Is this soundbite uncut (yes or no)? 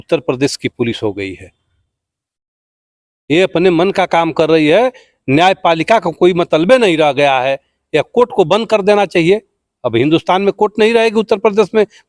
yes